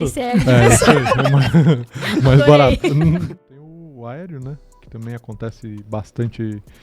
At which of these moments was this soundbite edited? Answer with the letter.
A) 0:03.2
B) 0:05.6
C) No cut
A